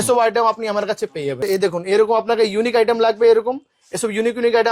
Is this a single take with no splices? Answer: no; 1 cut; at 1.4 s

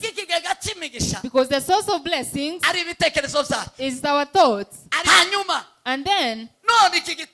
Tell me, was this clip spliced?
yes; 1 cut; at 4.8 s

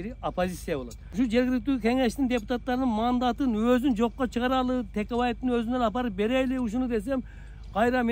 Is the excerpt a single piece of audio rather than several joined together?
no; 1 cut; at 1.0 s

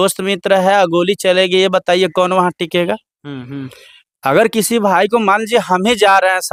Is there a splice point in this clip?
no; 0 cuts

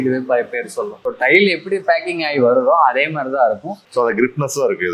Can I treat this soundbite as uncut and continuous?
no; 2 cuts; at 1.1 s, 3.9 s

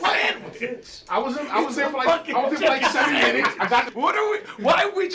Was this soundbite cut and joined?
yes; 1 cut; at 3.9 s

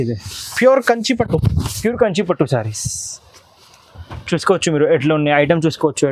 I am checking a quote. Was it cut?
no; 0 cuts

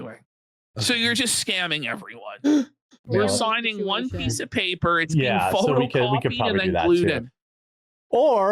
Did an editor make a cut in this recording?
no; 0 cuts

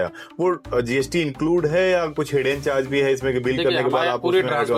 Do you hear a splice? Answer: no; 0 cuts

